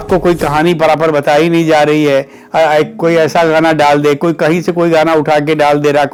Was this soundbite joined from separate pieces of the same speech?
no; 0 cuts

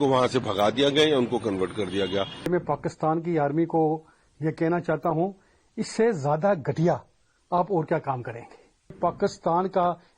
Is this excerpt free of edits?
no; 2 cuts; at 2.5 s, 9.0 s

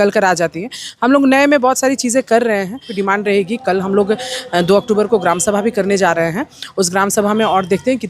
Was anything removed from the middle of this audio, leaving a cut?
yes; 1 cut; at 3.0 s

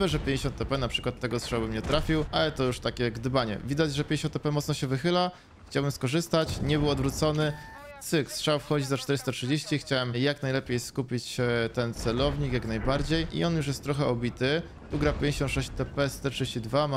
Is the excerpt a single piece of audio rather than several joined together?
yes; 0 cuts

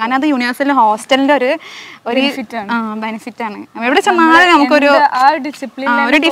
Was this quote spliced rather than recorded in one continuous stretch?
no; 0 cuts

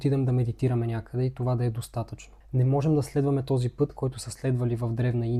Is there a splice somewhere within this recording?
no; 0 cuts

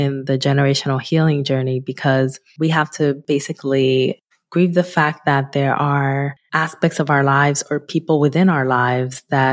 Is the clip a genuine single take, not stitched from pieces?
no; 3 cuts; at 2.4 s, 3.2 s, 6.4 s

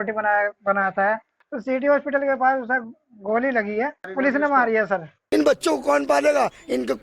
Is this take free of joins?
no; 3 cuts; at 1.4 s, 4.0 s, 5.1 s

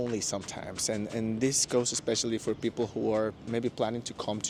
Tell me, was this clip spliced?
no; 0 cuts

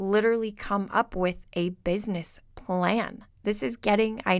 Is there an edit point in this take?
yes; 1 cut; at 3.2 s

